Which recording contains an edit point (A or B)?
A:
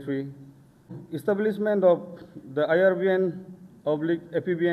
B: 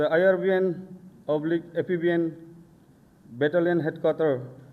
A